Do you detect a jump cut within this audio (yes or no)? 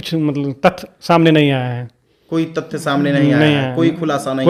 no